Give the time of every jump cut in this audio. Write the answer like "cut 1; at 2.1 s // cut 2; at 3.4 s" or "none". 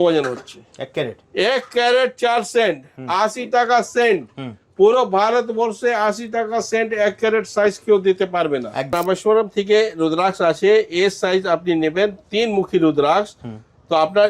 cut 1; at 8.9 s